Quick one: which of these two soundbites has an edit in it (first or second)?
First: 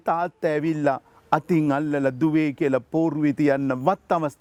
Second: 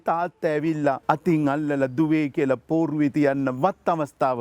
second